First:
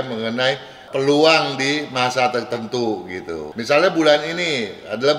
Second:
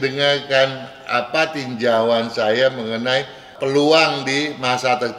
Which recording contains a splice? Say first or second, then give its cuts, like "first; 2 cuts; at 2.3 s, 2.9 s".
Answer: first; 1 cut; at 3.5 s